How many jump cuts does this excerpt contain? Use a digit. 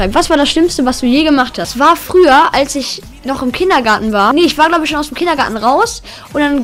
2